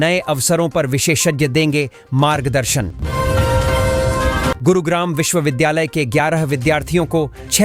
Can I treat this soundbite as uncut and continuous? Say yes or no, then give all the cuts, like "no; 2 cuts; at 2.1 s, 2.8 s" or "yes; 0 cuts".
no; 2 cuts; at 3.0 s, 4.6 s